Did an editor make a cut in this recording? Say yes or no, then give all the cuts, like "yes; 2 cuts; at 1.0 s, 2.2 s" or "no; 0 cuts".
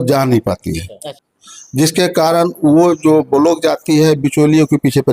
yes; 1 cut; at 1.1 s